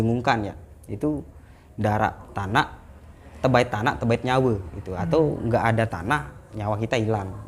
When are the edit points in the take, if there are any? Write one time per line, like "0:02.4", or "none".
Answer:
none